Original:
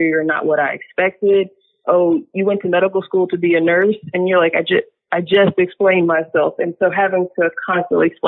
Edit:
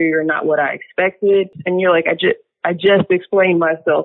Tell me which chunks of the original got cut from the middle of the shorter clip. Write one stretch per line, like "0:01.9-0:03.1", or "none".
0:01.6-0:04.1